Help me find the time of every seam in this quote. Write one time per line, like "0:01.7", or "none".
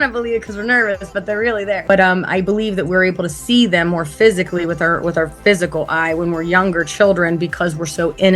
0:01.9